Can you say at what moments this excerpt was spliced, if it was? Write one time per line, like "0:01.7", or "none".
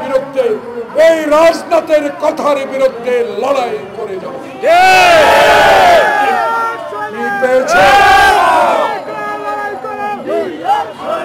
none